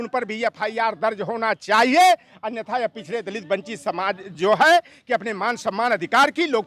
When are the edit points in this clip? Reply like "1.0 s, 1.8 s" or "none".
none